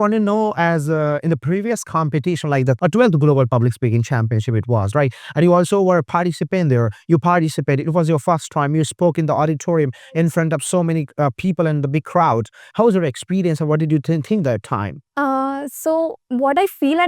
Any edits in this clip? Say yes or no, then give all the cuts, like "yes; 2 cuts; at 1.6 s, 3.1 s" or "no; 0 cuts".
yes; 2 cuts; at 2.8 s, 15.0 s